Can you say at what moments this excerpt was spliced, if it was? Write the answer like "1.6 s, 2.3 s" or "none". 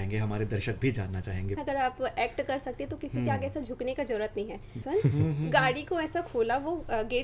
1.6 s, 4.8 s